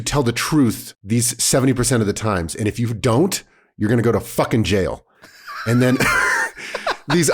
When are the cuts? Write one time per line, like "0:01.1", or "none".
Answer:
0:00.9